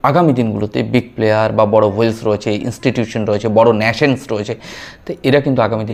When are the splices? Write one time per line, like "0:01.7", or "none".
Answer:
none